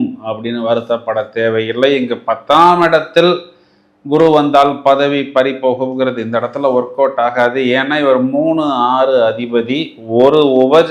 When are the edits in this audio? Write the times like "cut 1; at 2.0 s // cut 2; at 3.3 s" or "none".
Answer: none